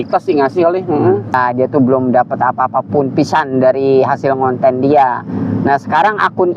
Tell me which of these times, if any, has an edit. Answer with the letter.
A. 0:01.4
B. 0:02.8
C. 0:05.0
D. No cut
A